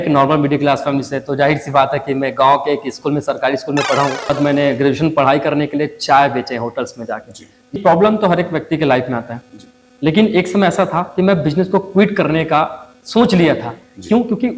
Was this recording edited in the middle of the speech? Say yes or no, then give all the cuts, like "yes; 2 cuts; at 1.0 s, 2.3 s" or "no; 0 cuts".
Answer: yes; 2 cuts; at 4.3 s, 7.8 s